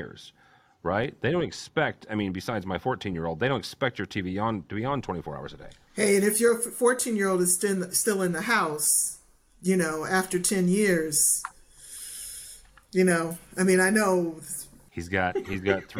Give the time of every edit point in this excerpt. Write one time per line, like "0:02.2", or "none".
0:15.0